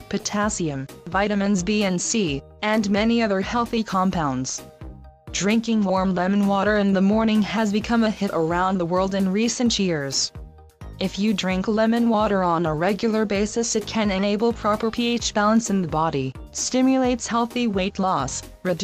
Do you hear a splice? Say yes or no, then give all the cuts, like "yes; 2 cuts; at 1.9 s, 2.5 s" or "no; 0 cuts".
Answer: no; 0 cuts